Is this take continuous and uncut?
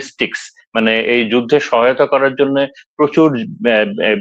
yes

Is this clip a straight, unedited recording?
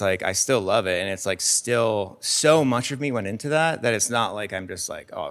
yes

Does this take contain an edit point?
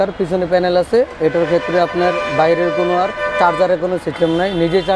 no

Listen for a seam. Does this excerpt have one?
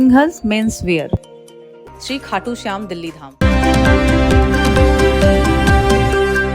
yes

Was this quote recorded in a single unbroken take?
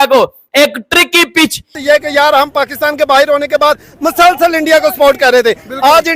no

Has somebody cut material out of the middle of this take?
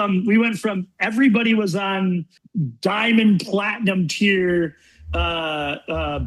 yes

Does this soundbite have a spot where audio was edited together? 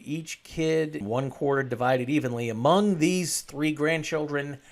yes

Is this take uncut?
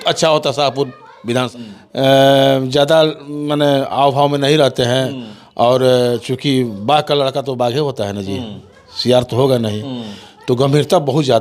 no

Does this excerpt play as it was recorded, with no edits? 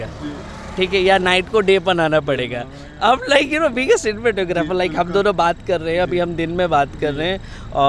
yes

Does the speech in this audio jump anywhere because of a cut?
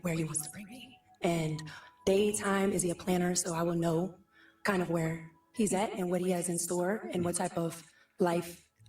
no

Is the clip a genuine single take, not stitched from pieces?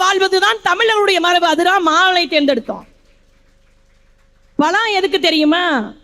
yes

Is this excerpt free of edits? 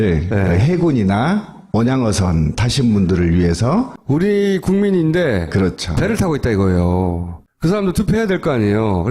yes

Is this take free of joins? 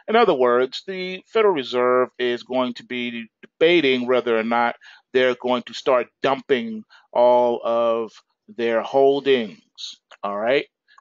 no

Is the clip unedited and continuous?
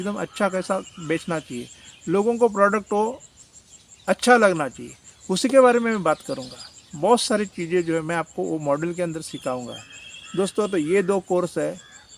yes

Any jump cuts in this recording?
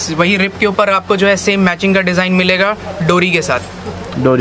no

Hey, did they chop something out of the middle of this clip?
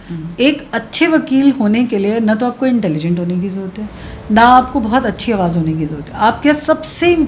no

